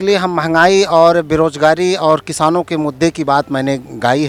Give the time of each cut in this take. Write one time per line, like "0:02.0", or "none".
none